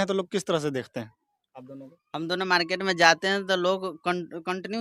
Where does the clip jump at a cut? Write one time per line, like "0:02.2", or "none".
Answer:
none